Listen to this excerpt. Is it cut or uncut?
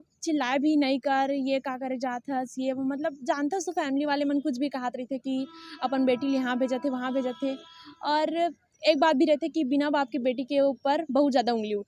uncut